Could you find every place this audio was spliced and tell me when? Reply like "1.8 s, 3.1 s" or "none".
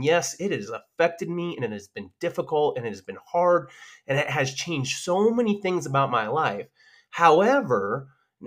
none